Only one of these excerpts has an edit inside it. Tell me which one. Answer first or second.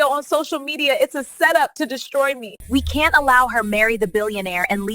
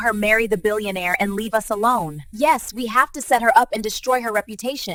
first